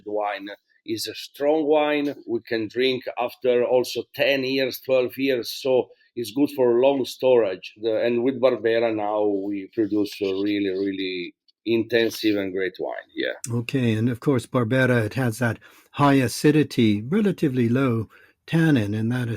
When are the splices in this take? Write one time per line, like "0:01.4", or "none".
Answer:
0:13.4